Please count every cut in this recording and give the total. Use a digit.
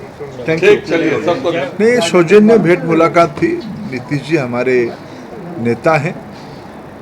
1